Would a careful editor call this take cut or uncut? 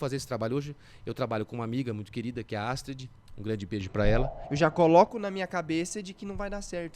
cut